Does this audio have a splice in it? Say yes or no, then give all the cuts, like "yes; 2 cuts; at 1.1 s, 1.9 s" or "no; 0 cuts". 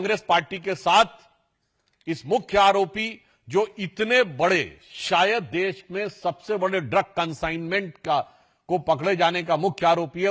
no; 0 cuts